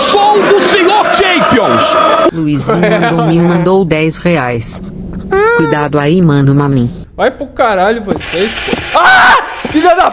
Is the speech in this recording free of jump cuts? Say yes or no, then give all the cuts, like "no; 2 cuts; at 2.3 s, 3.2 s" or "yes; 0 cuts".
no; 1 cut; at 7.0 s